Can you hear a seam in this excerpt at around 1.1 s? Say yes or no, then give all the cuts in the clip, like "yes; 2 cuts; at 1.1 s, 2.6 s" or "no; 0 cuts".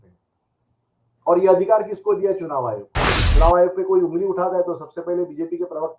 no; 1 cut; at 3.2 s